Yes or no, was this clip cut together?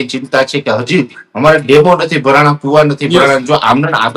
no